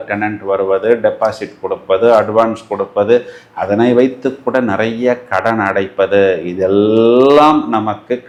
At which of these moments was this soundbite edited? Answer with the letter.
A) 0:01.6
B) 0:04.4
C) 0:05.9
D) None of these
D